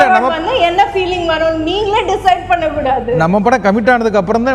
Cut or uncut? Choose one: uncut